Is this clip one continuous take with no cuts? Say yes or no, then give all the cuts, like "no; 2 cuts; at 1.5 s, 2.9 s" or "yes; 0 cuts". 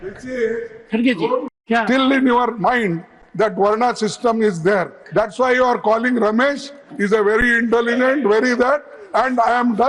no; 1 cut; at 1.5 s